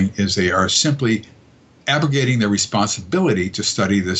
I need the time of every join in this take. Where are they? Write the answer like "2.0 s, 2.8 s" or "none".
none